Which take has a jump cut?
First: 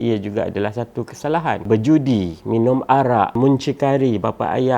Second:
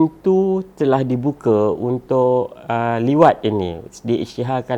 first; 2 cuts; at 1.6 s, 3.3 s

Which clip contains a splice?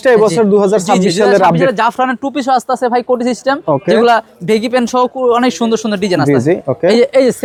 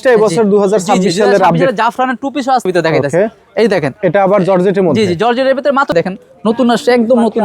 second; 2 cuts; at 2.7 s, 5.9 s

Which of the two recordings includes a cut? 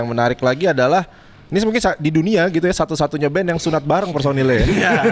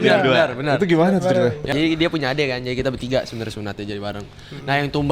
second; 1 cut; at 1.7 s

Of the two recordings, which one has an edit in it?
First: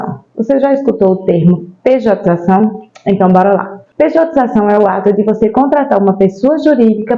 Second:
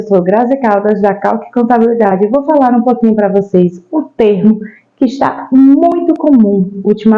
first; 1 cut; at 3.8 s

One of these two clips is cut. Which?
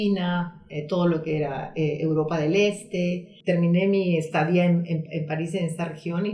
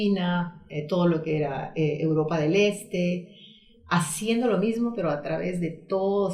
first; 1 cut; at 3.3 s

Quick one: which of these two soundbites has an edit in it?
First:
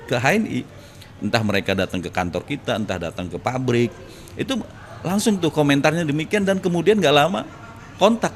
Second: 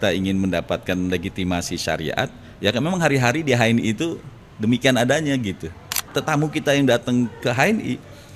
second; 1 cut; at 6.1 s

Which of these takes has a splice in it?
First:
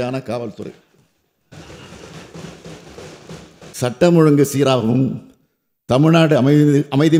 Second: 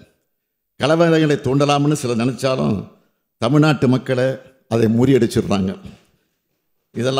first; 1 cut; at 3.7 s

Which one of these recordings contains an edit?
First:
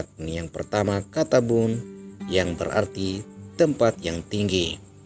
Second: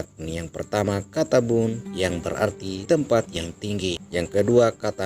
second; 2 cuts; at 2.2 s, 4.0 s

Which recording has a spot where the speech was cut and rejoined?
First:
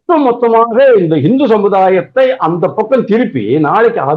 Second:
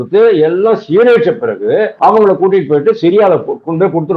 second; 1 cut; at 1.9 s

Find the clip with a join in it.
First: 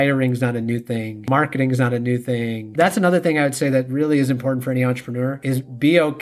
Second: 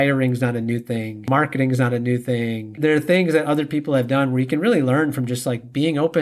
first; 1 cut; at 2.7 s

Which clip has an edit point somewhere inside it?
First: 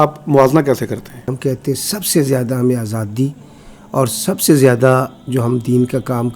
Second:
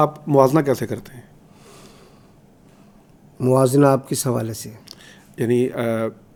first; 1 cut; at 1.3 s

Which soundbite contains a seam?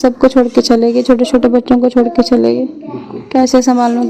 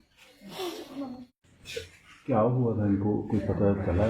second; 1 cut; at 1.2 s

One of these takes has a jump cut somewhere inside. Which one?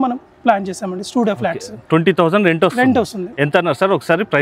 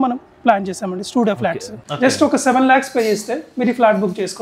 second; 1 cut; at 1.7 s

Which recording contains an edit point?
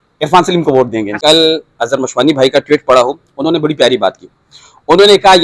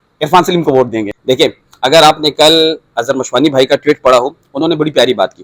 first; 1 cut; at 1.2 s

